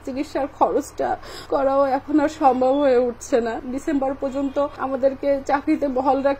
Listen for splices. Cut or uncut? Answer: cut